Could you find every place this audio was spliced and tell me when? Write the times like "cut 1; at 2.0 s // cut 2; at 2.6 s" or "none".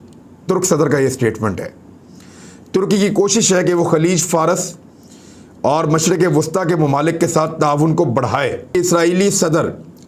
cut 1; at 8.7 s